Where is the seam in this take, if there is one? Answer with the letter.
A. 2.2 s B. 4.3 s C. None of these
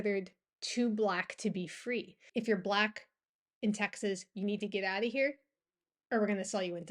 A